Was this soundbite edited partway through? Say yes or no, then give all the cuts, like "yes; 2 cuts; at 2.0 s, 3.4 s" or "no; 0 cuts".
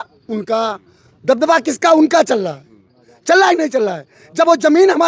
no; 0 cuts